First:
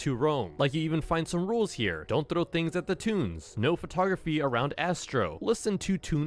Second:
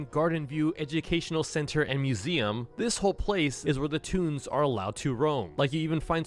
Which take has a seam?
first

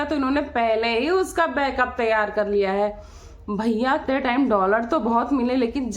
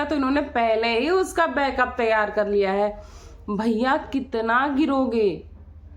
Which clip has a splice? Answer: first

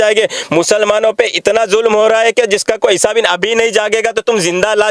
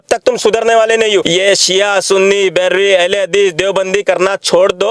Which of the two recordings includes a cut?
second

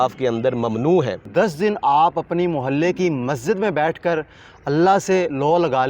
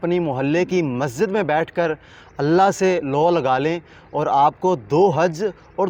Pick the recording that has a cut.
first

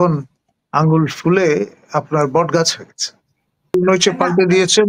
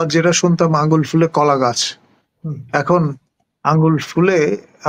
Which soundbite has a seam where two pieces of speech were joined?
first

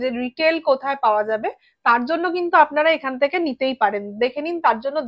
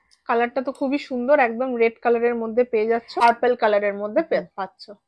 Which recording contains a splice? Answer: second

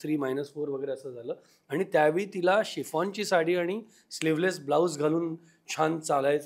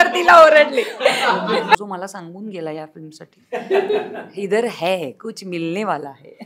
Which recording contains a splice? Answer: second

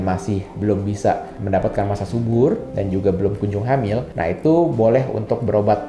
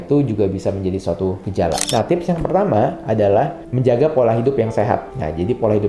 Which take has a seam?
second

